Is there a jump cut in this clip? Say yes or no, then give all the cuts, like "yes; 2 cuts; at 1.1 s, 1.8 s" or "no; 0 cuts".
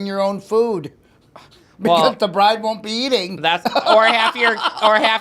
no; 0 cuts